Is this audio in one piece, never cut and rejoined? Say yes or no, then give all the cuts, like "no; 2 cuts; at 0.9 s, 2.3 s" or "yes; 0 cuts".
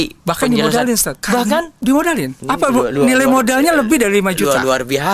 no; 2 cuts; at 1.1 s, 2.3 s